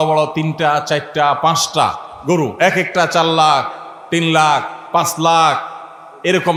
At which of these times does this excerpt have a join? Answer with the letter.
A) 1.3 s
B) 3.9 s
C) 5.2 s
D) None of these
D